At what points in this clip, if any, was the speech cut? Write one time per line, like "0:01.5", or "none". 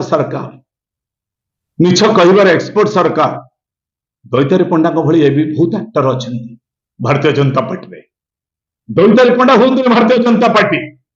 none

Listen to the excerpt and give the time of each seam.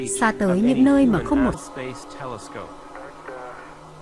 none

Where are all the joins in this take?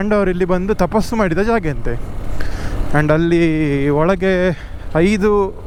none

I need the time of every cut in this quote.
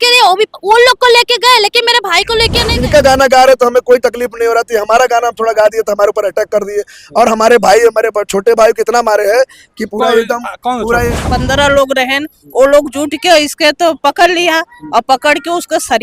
0:02.7
0:11.2

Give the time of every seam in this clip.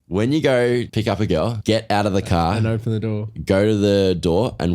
0:01.0

